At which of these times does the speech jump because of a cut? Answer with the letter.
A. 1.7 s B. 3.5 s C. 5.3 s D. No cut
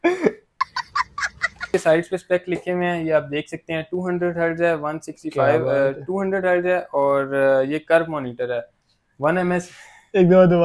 A